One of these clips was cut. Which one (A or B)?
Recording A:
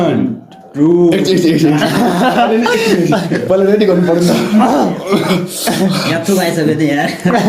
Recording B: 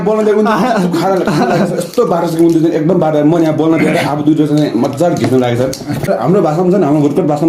B